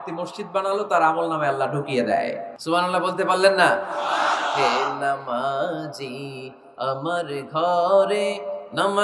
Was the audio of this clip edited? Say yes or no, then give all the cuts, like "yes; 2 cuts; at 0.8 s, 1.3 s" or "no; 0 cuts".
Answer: yes; 1 cut; at 2.5 s